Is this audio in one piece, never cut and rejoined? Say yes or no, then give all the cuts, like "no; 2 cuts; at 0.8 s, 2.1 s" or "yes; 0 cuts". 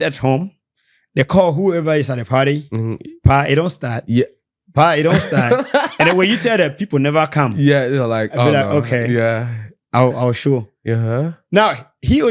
yes; 0 cuts